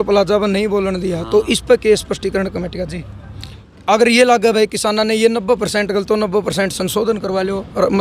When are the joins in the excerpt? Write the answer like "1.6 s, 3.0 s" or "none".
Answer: 3.7 s